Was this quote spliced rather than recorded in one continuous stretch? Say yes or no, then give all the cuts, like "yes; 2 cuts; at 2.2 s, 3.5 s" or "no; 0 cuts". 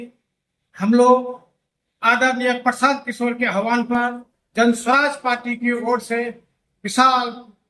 no; 0 cuts